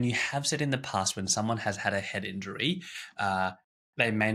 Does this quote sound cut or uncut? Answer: uncut